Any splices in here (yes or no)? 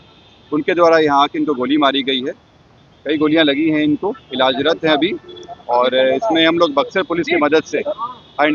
no